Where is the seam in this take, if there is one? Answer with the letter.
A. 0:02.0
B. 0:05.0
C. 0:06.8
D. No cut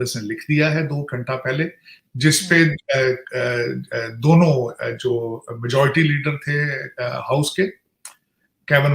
D